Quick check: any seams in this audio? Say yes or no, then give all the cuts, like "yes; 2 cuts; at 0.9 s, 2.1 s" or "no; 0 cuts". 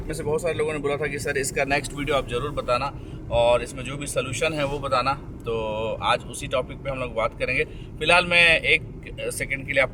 no; 0 cuts